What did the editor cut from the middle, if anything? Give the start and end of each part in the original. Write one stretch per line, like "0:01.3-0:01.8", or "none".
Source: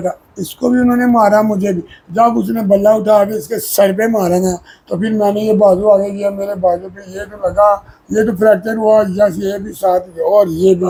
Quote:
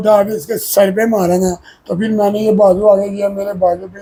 none